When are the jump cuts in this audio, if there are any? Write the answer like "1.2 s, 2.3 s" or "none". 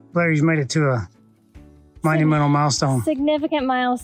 none